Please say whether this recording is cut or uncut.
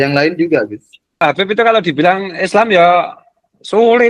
cut